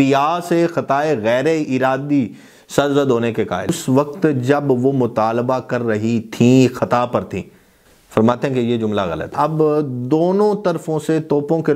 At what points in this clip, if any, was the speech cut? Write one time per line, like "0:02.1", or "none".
0:03.8
0:09.3

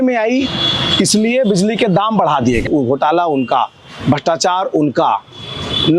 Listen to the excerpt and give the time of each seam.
0:02.7

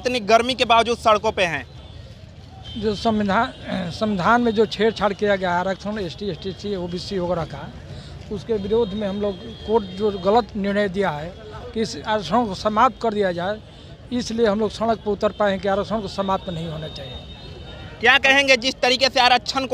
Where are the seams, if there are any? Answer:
none

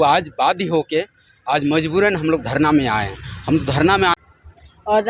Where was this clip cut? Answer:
0:04.2

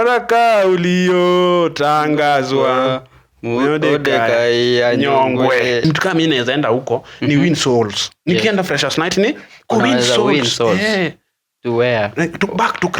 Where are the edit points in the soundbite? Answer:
0:05.8

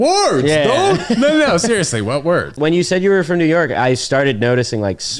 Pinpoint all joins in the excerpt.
0:02.5

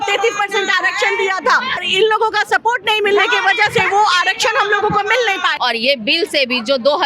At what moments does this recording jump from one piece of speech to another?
0:01.8
0:05.5

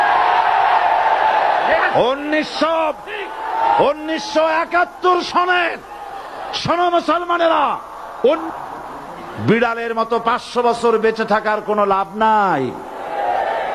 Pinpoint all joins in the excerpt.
0:08.4

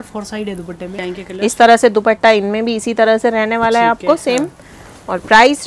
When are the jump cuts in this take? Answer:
0:01.1

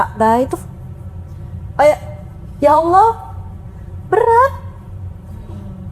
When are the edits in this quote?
none

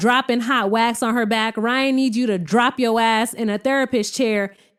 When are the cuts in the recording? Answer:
none

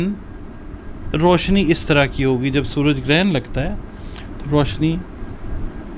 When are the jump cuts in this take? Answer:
none

